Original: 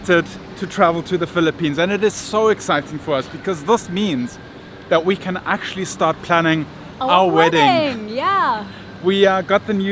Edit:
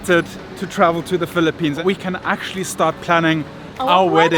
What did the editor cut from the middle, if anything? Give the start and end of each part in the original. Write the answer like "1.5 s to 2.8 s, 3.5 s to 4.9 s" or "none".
1.8 s to 5.0 s